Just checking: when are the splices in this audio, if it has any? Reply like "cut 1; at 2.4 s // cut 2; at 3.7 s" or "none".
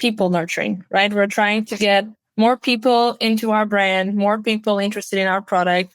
none